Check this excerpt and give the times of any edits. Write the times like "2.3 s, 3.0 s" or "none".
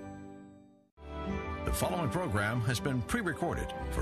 0.9 s